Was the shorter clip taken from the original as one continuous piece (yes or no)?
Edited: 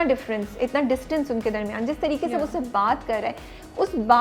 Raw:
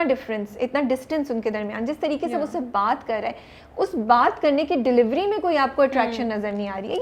yes